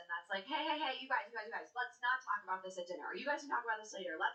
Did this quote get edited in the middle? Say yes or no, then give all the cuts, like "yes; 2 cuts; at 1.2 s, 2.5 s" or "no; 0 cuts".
no; 0 cuts